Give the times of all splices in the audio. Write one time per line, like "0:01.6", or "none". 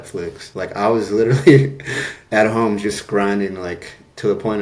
none